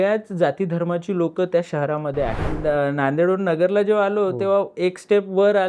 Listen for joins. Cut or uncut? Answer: cut